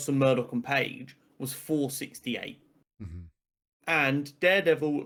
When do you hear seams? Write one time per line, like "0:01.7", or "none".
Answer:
none